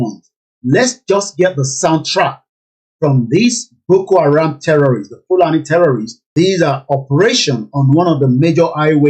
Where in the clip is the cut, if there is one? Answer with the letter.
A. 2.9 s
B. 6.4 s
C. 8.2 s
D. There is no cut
B